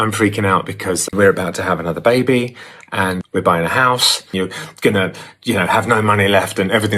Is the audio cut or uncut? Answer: cut